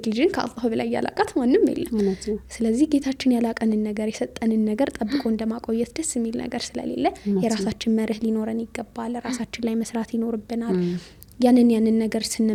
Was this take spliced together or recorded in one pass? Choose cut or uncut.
uncut